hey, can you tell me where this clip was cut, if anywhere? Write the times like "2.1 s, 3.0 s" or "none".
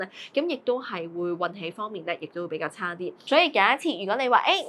3.2 s